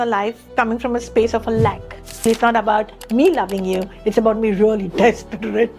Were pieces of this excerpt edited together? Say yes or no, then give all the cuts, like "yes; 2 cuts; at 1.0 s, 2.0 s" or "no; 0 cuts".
yes; 1 cut; at 2.2 s